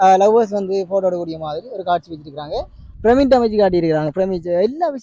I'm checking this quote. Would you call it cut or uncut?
cut